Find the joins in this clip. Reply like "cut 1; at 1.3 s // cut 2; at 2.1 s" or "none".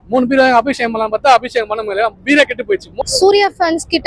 cut 1; at 2.9 s